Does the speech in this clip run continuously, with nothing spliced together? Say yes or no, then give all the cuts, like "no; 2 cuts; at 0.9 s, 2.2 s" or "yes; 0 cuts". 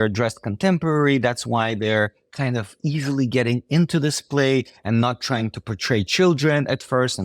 yes; 0 cuts